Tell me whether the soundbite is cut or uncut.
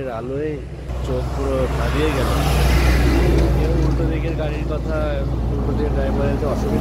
cut